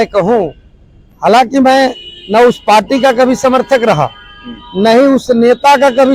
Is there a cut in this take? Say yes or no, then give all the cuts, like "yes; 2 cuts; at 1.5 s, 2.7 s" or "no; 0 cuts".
no; 0 cuts